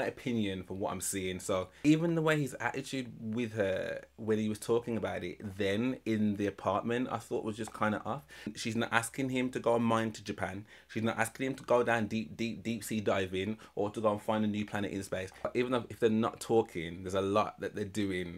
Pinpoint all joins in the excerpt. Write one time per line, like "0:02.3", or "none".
0:01.7
0:08.5
0:15.5